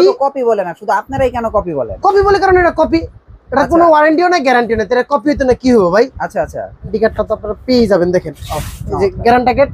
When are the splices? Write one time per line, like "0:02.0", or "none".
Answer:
0:06.9